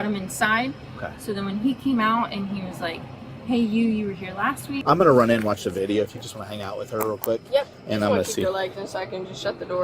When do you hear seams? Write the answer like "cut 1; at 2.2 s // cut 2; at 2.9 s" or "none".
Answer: cut 1; at 4.7 s